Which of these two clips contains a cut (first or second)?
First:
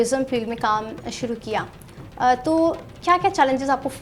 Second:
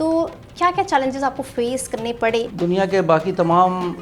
second